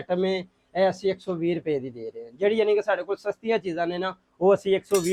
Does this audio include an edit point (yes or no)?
no